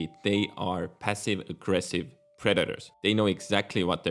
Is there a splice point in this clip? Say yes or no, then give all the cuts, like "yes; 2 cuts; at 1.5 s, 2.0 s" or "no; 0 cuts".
yes; 1 cut; at 2.8 s